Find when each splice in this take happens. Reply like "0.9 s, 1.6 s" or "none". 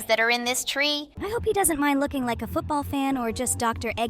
1.1 s